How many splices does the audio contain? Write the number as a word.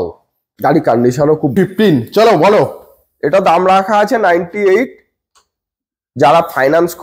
one